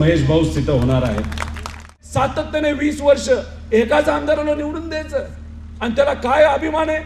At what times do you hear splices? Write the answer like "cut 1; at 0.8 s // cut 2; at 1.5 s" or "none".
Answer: cut 1; at 2.0 s